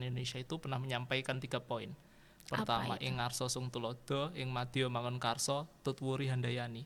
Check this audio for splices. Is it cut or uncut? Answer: uncut